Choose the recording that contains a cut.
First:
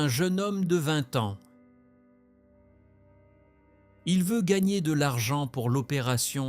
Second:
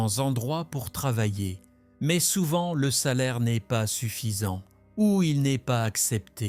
first; 2 cuts; at 1.4 s, 4.0 s

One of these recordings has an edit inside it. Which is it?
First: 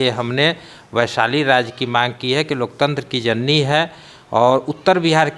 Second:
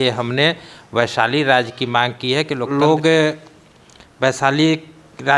second; 1 cut; at 2.6 s

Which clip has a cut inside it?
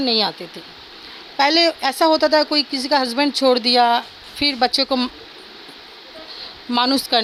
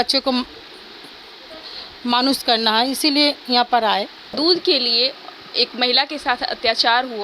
second; 1 cut; at 4.3 s

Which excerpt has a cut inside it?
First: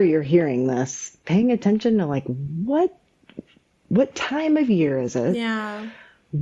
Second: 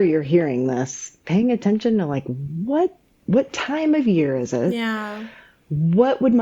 second; 1 cut; at 3.1 s

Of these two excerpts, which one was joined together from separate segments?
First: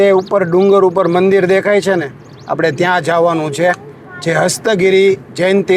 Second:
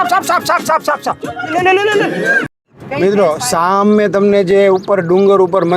second; 1 cut; at 2.8 s

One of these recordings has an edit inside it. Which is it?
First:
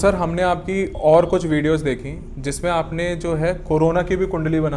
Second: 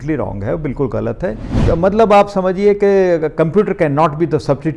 second; 1 cut; at 1.5 s

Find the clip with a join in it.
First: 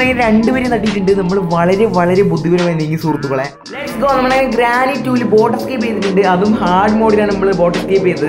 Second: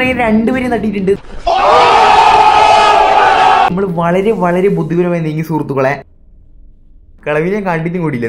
first; 2 cuts; at 1.3 s, 3.9 s

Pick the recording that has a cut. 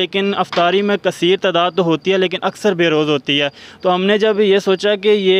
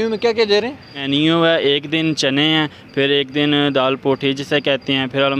second; 1 cut; at 1.0 s

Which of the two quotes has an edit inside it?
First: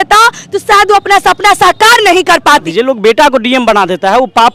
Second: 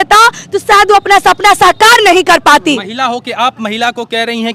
first; 1 cut; at 2.7 s

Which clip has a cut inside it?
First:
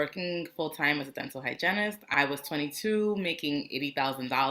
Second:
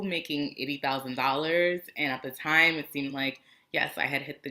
first; 1 cut; at 2.0 s

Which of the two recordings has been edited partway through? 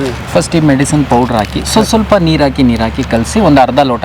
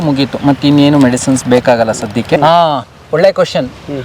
second; 1 cut; at 2.4 s

